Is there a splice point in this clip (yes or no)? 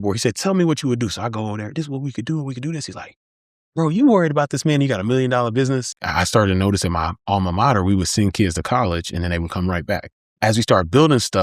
yes